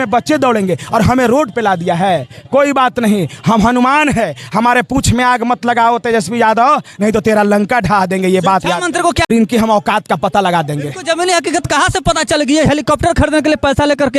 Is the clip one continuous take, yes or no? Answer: no